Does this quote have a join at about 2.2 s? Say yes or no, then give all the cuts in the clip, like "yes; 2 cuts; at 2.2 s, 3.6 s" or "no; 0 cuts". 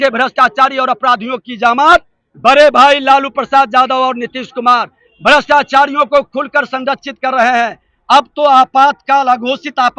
yes; 1 cut; at 2.2 s